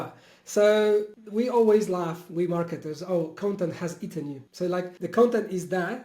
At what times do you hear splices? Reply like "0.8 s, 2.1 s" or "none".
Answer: 1.2 s, 4.8 s